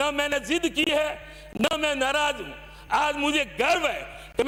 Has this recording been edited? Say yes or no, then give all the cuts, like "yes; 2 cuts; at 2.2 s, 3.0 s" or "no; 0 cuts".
no; 0 cuts